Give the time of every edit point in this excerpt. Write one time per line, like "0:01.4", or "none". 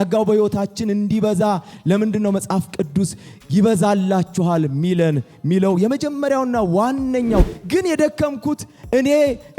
0:07.5